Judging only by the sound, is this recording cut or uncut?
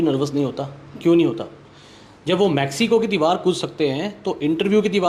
uncut